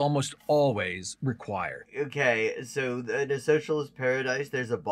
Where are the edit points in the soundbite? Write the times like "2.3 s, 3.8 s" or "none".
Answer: 1.8 s